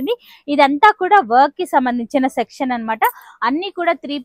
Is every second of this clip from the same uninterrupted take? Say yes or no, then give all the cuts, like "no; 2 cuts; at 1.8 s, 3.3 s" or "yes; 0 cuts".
yes; 0 cuts